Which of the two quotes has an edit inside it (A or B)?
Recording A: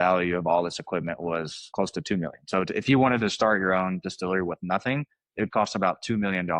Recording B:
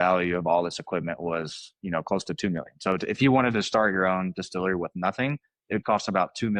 A